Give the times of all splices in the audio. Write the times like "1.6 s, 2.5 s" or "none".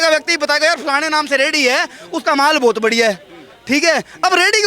none